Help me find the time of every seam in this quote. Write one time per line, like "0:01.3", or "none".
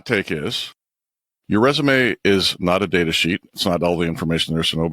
0:01.2